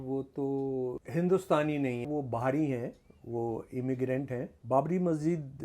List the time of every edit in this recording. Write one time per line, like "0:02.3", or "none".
0:01.0
0:02.1
0:04.5